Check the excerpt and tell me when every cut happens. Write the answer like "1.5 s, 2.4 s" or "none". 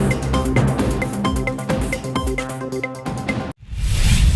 3.5 s

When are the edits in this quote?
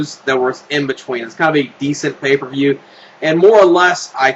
none

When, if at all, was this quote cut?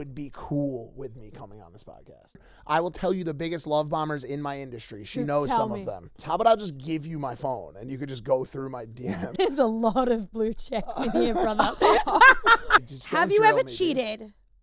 2.4 s, 6.2 s, 9.3 s, 12.8 s

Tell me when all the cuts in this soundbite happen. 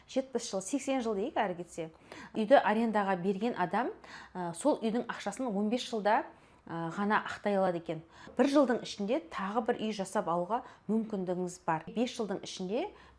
2.3 s, 8.3 s, 11.9 s

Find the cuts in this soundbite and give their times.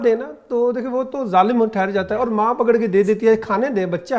none

